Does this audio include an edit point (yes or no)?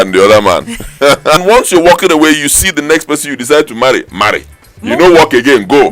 yes